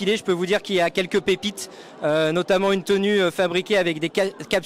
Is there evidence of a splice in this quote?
no; 0 cuts

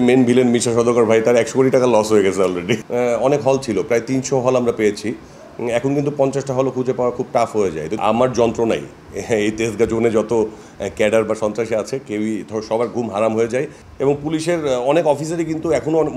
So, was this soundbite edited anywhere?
yes; 3 cuts; at 2.8 s, 8.0 s, 13.8 s

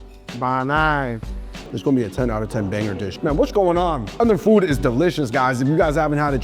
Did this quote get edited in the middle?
yes; 2 cuts; at 1.7 s, 3.1 s

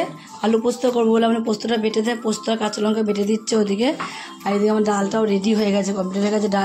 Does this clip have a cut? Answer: no; 0 cuts

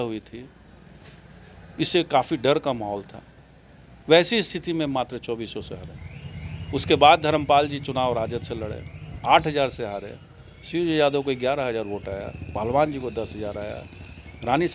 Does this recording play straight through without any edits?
yes; 0 cuts

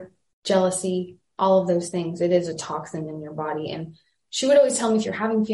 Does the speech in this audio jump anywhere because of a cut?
no; 0 cuts

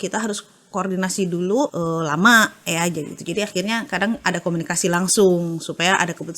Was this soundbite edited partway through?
yes; 1 cut; at 1.7 s

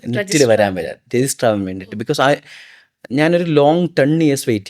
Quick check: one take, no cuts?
yes; 0 cuts

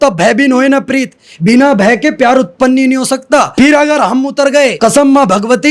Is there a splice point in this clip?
yes; 2 cuts; at 3.5 s, 4.8 s

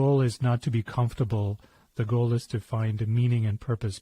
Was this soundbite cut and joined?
yes; 1 cut; at 1.9 s

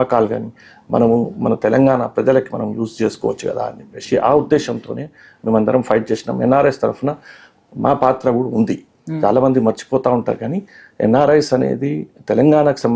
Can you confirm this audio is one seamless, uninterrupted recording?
yes; 0 cuts

